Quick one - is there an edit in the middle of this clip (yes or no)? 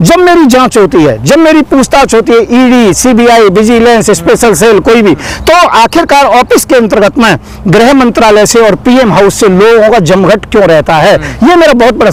no